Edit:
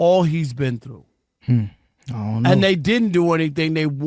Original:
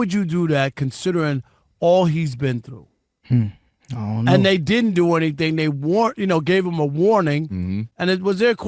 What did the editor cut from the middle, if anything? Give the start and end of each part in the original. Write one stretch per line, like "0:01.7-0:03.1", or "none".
none